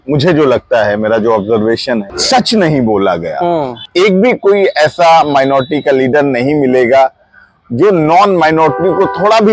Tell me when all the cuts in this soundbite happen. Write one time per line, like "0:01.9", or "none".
0:02.1
0:03.8